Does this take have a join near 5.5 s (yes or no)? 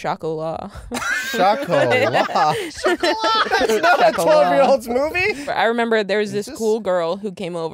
yes